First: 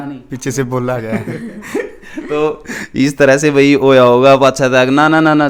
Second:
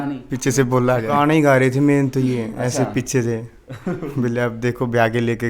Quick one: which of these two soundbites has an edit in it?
second; 1 cut; at 1.1 s

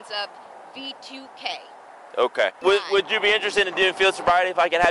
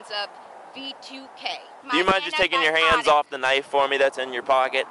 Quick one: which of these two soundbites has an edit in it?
second; 1 cut; at 1.7 s

